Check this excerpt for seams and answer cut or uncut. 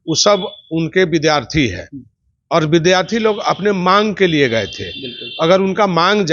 uncut